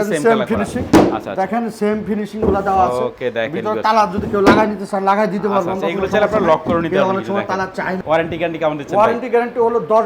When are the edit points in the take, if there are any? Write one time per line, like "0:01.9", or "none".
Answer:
0:08.0

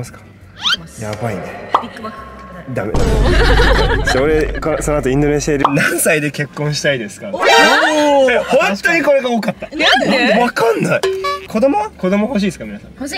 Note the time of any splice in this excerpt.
0:05.6
0:11.4

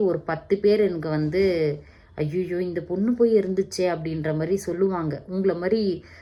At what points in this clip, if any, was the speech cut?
none

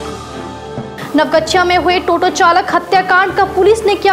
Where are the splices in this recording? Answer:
0:00.9

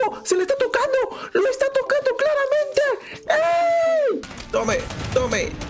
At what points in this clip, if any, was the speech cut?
0:04.3

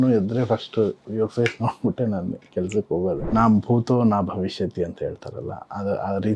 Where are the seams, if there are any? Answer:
0:03.2

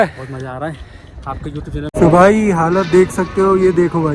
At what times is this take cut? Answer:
0:01.7

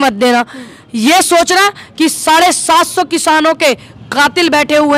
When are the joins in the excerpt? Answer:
none

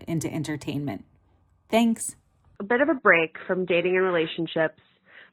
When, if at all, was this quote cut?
0:02.6

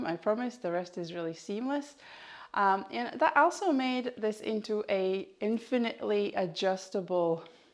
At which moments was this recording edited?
none

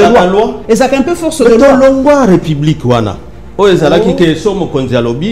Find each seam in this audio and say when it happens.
none

